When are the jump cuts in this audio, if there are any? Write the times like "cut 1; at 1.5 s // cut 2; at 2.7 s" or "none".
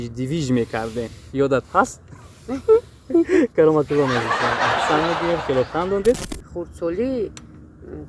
cut 1; at 6.3 s